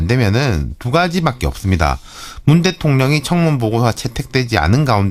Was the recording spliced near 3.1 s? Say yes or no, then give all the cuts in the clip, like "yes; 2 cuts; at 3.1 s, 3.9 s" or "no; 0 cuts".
no; 1 cut; at 1.5 s